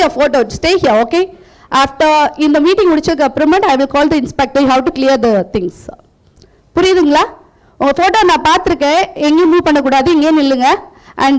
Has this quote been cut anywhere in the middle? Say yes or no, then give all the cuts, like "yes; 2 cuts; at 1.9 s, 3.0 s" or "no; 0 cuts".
no; 0 cuts